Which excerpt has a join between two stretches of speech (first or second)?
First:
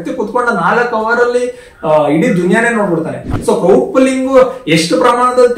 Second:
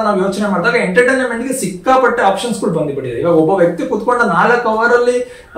first